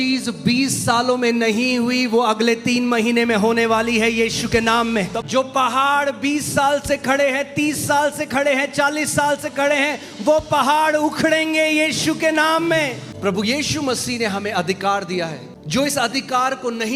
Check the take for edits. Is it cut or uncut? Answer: cut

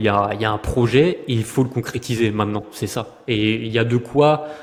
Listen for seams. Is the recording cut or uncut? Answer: uncut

